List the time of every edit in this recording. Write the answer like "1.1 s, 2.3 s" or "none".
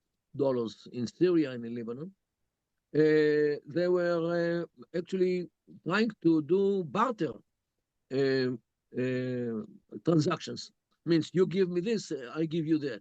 none